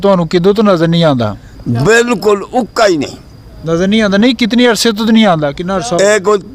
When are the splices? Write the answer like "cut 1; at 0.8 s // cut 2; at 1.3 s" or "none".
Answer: none

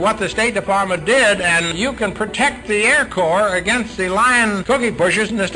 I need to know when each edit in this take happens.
cut 1; at 1.7 s // cut 2; at 4.6 s

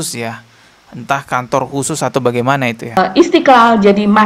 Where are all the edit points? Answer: cut 1; at 3.0 s

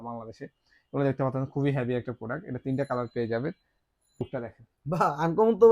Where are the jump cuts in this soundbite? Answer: cut 1; at 4.2 s

